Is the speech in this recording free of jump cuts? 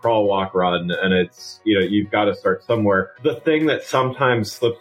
no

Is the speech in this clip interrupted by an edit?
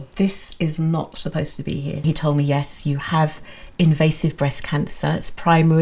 yes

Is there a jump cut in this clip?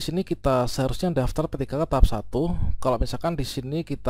no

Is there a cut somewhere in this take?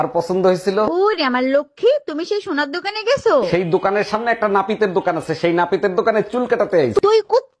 no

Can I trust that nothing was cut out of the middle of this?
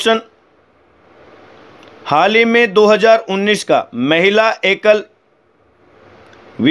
yes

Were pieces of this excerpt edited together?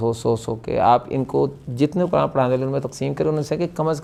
no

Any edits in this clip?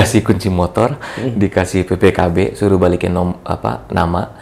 no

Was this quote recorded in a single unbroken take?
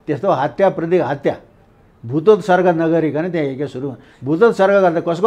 yes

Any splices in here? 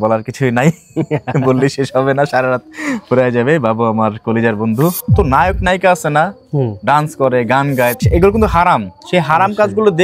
yes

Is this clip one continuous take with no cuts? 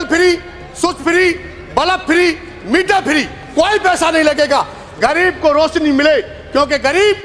yes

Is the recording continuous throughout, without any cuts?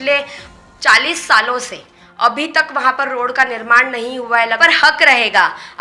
no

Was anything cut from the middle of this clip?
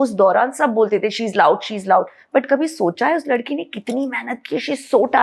no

